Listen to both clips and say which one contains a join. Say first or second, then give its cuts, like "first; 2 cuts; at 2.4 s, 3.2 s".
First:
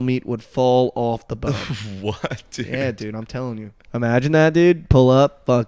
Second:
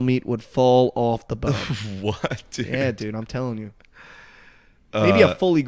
first; 1 cut; at 3.8 s